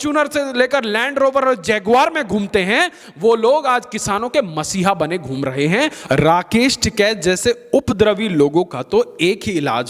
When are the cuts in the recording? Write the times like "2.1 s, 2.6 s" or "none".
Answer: 6.0 s